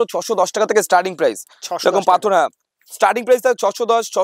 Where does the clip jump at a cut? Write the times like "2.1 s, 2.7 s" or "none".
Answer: none